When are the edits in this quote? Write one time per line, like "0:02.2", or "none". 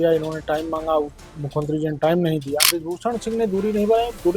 0:02.7